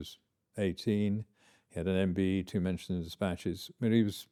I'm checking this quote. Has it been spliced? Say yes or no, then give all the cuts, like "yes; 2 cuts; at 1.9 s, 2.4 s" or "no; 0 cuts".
no; 0 cuts